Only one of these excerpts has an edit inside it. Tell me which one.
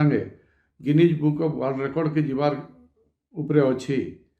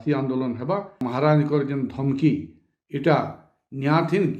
second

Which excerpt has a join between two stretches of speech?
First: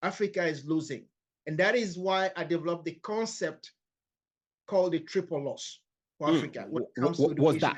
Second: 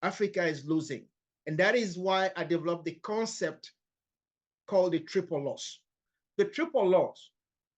second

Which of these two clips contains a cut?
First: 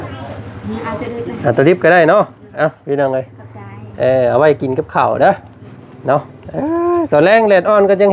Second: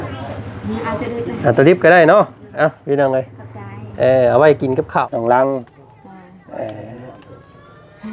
second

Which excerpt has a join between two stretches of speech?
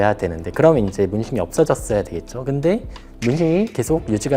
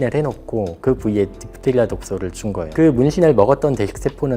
second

